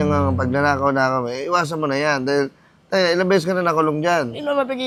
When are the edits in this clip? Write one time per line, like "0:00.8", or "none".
none